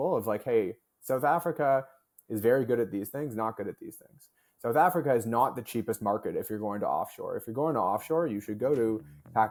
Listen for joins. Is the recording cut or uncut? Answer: uncut